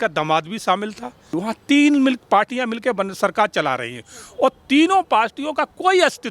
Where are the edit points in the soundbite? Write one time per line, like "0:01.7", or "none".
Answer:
0:01.3